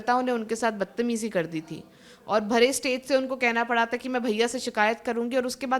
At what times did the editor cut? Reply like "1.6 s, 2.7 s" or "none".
none